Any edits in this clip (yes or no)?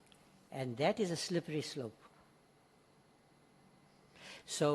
no